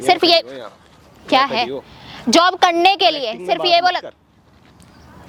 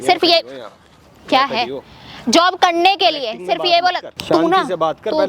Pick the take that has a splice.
second; 1 cut; at 4.1 s

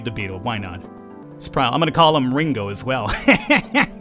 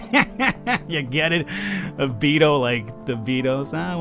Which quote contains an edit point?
first; 1 cut; at 1.2 s

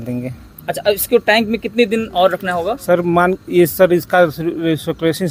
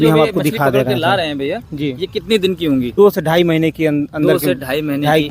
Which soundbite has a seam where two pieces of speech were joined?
second; 1 cut; at 2.9 s

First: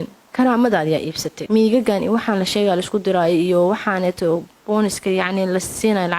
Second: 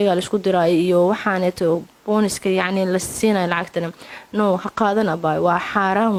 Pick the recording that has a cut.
first; 1 cut; at 1.3 s

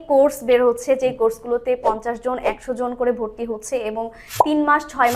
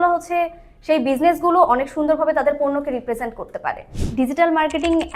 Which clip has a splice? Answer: second; 1 cut; at 3.9 s

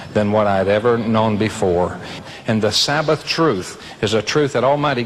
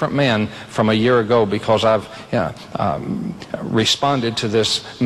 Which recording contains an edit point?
first; 1 cut; at 2.2 s

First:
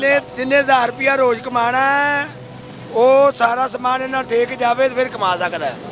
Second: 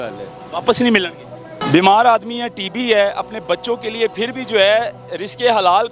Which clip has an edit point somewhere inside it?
second; 1 cut; at 1.5 s

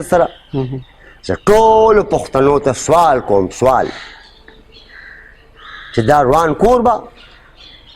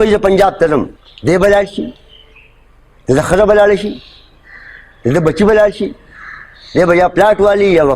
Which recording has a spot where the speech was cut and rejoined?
second; 1 cut; at 1.0 s

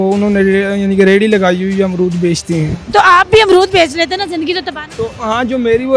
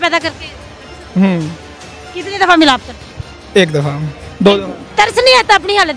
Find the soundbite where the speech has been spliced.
second; 1 cut; at 4.8 s

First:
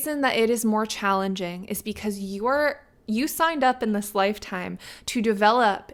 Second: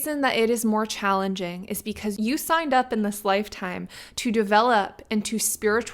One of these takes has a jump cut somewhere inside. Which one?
second; 1 cut; at 2.2 s

